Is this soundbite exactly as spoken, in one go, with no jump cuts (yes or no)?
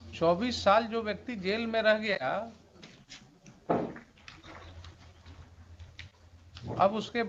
yes